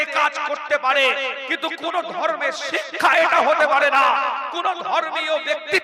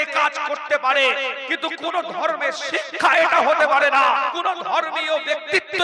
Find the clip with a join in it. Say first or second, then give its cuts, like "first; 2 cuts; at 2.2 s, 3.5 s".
second; 1 cut; at 4.3 s